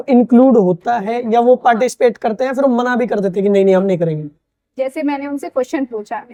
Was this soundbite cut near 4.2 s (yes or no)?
no